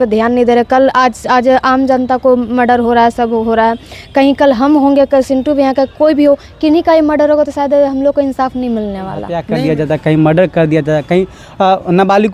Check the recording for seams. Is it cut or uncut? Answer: cut